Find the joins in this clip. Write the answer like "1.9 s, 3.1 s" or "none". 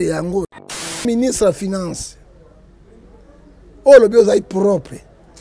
1.0 s